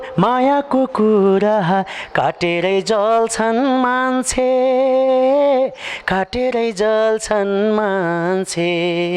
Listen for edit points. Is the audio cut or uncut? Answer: uncut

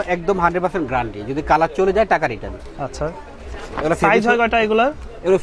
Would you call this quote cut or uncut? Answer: uncut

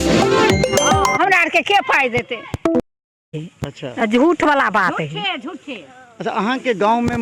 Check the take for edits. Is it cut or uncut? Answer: uncut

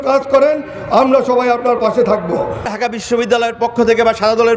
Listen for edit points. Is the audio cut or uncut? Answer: cut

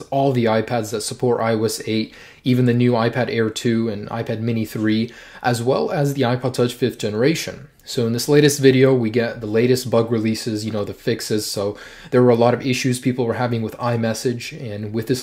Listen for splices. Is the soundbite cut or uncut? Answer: cut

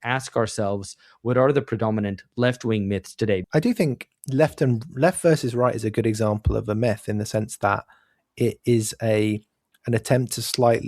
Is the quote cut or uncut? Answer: cut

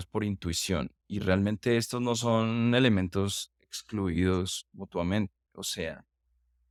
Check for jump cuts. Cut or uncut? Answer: uncut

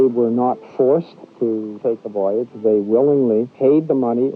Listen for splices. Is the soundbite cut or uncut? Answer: cut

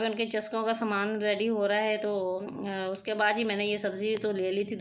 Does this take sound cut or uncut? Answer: uncut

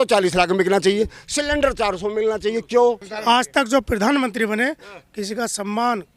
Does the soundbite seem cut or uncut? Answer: cut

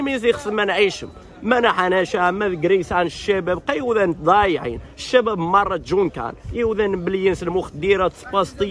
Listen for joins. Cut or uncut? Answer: uncut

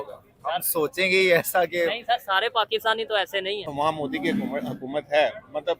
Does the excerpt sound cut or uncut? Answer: cut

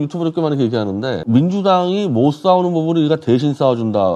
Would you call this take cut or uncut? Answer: cut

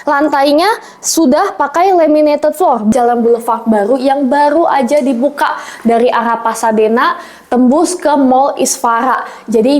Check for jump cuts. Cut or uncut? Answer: cut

